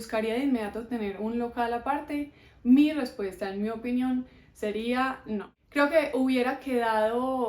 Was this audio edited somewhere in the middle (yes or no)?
yes